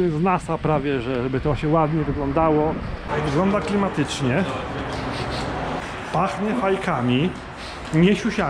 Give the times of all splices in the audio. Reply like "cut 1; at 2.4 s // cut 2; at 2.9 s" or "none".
cut 1; at 3.0 s // cut 2; at 5.8 s